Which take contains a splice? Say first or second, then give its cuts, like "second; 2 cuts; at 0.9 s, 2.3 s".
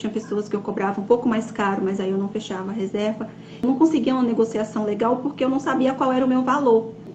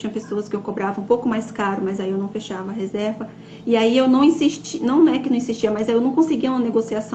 first; 1 cut; at 3.6 s